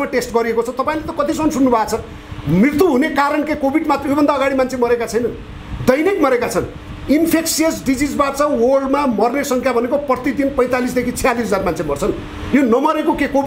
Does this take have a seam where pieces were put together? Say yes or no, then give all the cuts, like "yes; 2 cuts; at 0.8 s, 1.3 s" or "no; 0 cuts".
no; 0 cuts